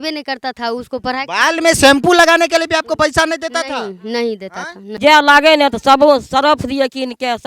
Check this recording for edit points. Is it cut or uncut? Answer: cut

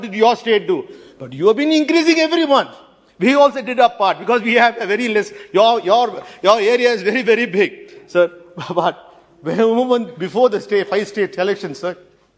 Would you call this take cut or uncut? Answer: uncut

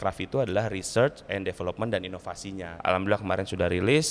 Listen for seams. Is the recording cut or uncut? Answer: cut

